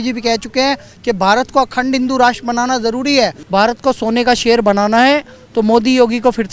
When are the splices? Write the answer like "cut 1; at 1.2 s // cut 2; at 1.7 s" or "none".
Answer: cut 1; at 3.4 s